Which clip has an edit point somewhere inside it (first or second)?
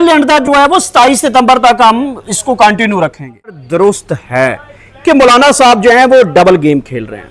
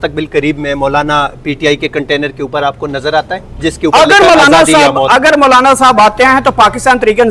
first